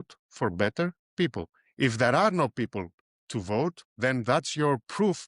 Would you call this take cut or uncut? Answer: uncut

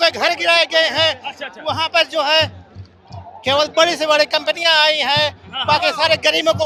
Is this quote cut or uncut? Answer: uncut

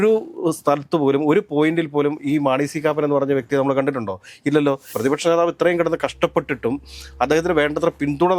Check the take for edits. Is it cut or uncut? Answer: cut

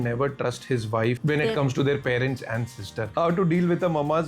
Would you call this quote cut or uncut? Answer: cut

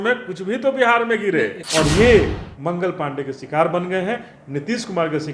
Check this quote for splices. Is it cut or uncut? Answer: cut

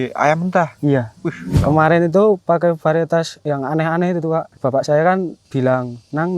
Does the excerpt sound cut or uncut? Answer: cut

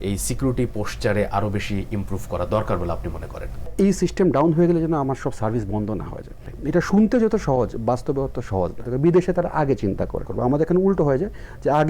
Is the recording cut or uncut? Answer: cut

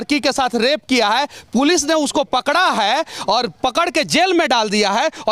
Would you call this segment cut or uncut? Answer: uncut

